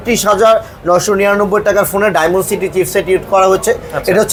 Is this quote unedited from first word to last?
yes; 0 cuts

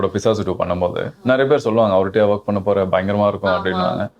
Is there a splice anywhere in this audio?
no; 0 cuts

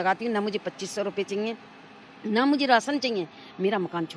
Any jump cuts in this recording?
no; 0 cuts

